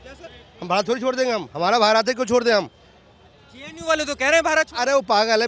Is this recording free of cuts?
yes; 0 cuts

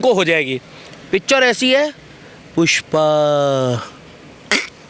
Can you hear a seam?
no; 0 cuts

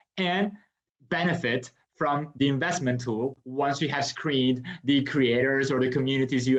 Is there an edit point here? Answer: no; 0 cuts

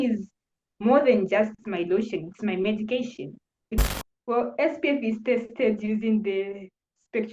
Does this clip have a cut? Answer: yes; 1 cut; at 3.8 s

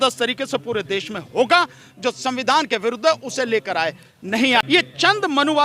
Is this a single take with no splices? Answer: no; 1 cut; at 4.6 s

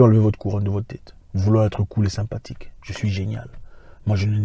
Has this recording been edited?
no; 0 cuts

